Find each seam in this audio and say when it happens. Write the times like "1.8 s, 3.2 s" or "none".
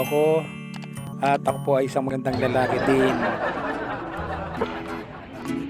4.5 s